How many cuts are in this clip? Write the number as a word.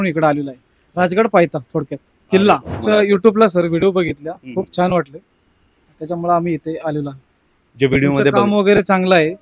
one